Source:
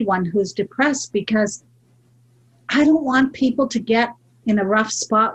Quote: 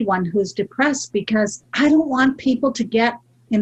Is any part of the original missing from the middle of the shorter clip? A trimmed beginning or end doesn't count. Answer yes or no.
yes